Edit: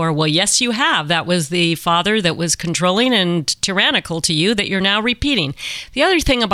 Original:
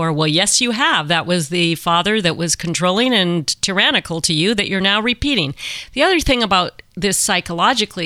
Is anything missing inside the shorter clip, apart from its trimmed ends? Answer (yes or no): no